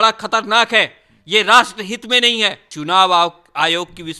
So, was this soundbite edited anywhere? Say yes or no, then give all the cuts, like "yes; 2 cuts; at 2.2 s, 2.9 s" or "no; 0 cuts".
yes; 1 cut; at 2.7 s